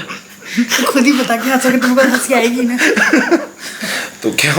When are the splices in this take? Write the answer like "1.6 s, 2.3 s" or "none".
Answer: none